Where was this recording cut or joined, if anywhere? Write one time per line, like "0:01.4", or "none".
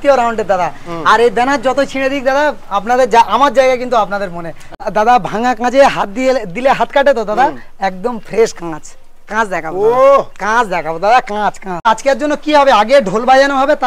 0:04.9
0:11.9

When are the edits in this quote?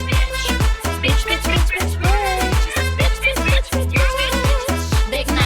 none

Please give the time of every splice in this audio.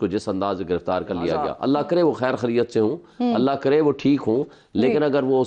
0:01.5

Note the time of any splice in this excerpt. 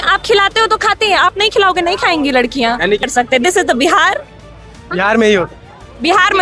0:03.1

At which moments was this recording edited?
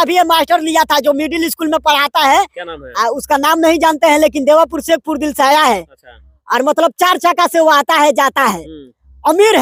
none

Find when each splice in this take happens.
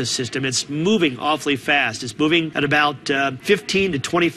0:02.5
0:03.4

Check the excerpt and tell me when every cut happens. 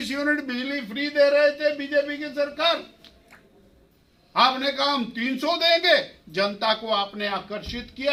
none

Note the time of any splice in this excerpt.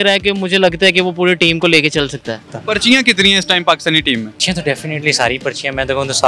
0:02.5
0:04.4

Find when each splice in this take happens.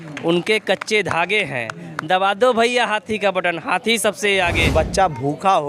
0:04.6

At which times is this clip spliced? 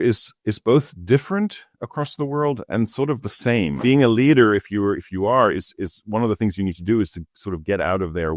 0:03.7

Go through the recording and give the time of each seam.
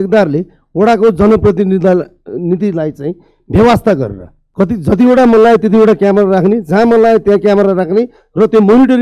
0:04.4

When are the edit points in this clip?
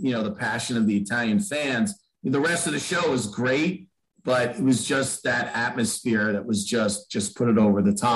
none

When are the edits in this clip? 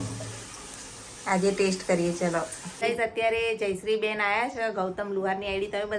0:02.6

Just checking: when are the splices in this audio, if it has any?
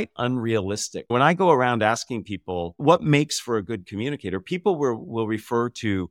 0:00.9

